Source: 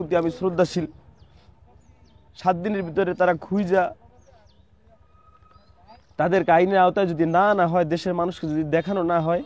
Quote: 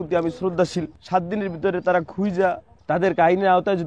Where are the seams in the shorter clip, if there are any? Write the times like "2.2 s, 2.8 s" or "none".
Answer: 1.0 s, 2.7 s